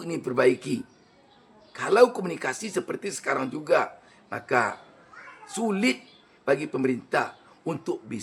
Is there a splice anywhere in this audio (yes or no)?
no